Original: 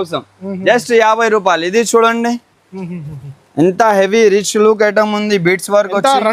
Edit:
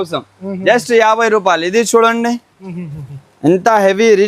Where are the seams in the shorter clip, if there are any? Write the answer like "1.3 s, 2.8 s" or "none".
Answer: 2.5 s